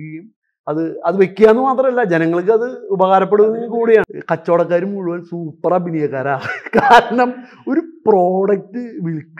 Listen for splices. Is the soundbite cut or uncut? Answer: cut